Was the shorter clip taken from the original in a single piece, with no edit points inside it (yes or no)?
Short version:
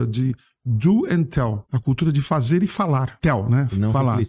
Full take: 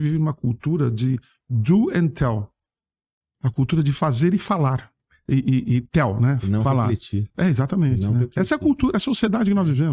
no